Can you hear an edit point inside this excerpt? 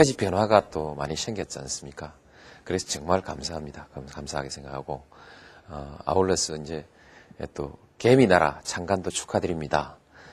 yes; 1 cut; at 2.6 s

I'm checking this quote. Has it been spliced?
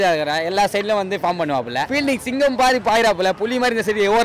yes; 1 cut; at 1.9 s

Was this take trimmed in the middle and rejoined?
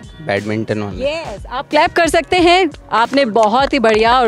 no; 0 cuts

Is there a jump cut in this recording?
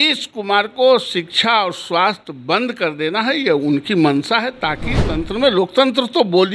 yes; 1 cut; at 5.0 s

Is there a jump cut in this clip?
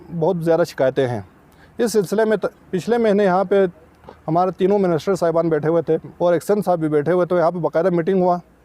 yes; 1 cut; at 6.1 s

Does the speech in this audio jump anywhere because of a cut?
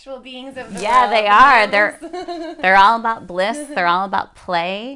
no; 0 cuts

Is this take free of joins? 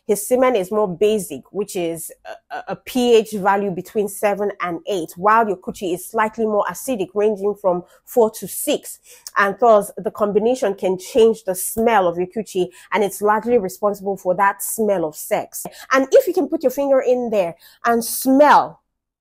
no; 1 cut; at 15.7 s

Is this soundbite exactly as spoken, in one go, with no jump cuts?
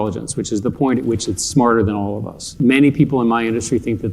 no; 1 cut; at 2.5 s

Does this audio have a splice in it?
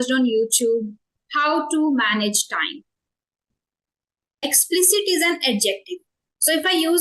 yes; 1 cut; at 4.3 s

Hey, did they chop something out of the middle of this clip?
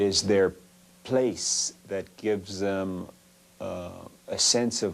yes; 1 cut; at 1.5 s

